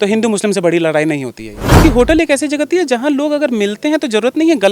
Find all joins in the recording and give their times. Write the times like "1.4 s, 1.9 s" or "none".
1.8 s